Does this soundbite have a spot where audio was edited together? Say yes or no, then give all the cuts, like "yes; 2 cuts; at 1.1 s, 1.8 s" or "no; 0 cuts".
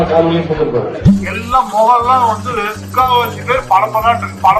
yes; 1 cut; at 0.9 s